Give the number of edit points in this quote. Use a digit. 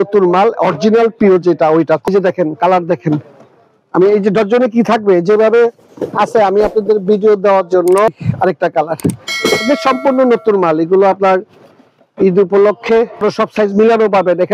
3